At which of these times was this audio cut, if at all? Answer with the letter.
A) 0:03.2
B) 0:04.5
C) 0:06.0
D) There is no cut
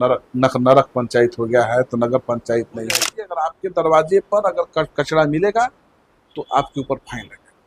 A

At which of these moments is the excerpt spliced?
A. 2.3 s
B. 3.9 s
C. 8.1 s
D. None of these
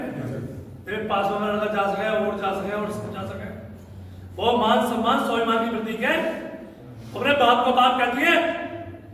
D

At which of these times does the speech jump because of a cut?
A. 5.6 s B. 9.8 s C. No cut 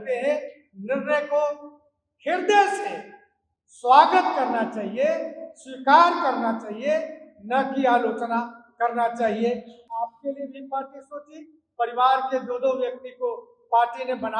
B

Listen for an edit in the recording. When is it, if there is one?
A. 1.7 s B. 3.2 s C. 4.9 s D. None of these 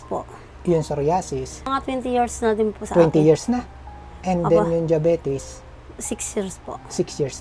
A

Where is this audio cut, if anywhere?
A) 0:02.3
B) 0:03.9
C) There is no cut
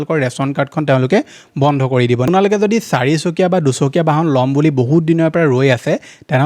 A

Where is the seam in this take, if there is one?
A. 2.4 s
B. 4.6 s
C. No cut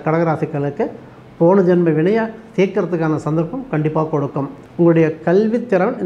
B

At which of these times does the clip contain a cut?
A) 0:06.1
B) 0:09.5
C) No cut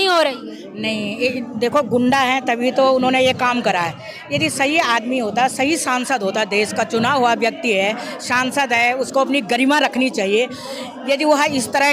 C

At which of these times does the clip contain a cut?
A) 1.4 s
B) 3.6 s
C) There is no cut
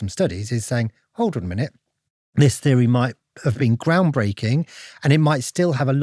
B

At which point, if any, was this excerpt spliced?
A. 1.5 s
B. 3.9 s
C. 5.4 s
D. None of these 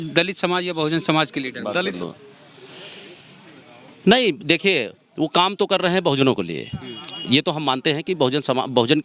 D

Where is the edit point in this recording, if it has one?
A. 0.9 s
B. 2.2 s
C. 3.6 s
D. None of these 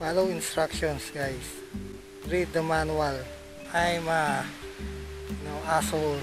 C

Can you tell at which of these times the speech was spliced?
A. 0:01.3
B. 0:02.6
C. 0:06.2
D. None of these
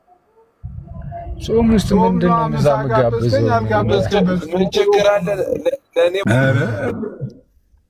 C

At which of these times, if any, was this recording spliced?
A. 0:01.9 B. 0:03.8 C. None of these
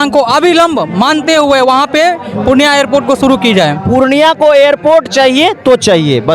B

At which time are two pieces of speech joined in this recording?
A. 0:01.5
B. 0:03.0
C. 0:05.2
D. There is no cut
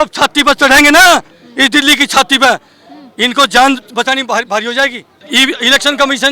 C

